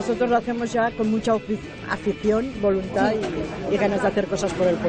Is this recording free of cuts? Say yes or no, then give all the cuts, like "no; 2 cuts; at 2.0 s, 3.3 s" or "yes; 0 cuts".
yes; 0 cuts